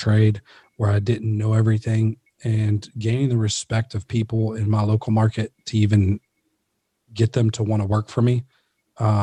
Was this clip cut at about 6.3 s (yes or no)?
no